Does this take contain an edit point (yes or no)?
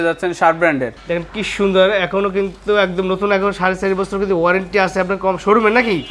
yes